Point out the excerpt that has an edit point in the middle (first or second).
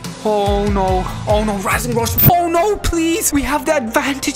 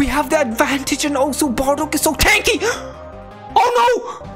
first